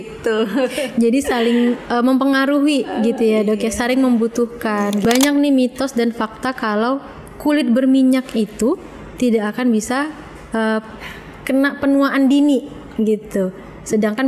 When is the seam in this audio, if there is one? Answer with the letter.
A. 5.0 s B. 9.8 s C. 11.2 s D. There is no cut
A